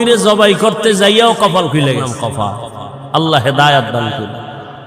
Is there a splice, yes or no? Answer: yes